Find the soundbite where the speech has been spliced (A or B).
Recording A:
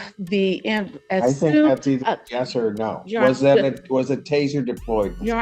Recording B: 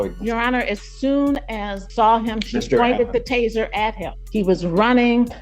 B